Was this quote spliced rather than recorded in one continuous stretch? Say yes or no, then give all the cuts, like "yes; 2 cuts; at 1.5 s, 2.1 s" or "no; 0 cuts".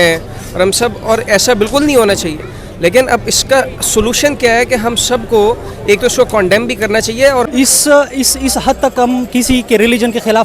yes; 1 cut; at 7.5 s